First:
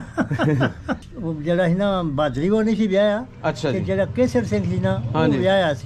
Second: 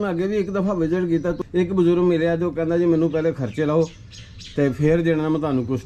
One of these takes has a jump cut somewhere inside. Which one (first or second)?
first